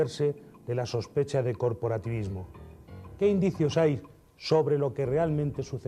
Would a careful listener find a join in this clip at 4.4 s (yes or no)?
no